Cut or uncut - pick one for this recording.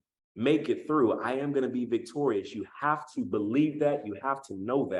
uncut